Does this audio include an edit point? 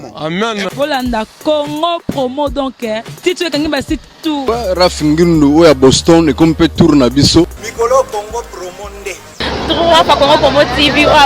yes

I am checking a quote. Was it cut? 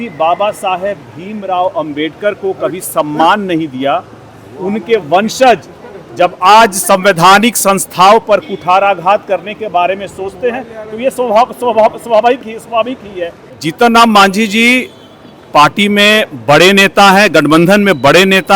yes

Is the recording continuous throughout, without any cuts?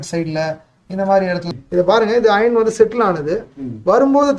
no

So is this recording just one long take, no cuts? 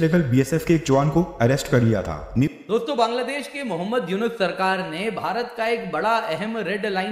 no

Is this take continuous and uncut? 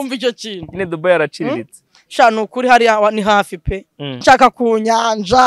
no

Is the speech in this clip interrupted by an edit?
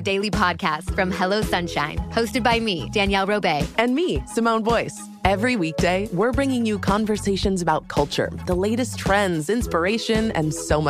no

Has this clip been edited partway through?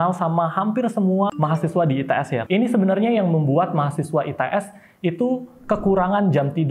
yes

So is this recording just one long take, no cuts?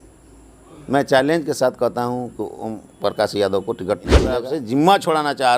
no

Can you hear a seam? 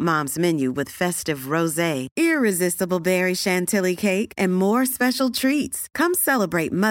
no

